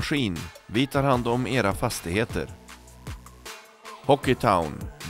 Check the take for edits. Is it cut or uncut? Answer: uncut